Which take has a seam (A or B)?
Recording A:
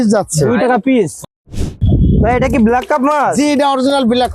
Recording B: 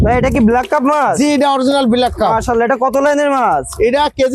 A